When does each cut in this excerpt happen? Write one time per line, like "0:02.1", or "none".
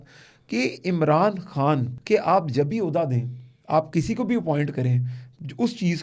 0:01.9